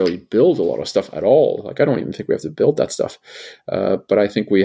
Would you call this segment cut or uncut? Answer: uncut